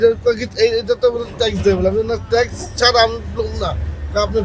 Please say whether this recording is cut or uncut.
uncut